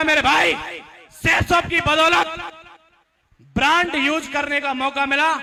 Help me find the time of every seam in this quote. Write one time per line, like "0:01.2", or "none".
none